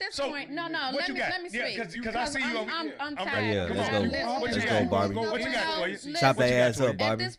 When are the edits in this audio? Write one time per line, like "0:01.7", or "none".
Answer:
none